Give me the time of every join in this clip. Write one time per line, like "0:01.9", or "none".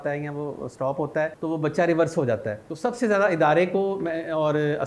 0:01.4
0:02.6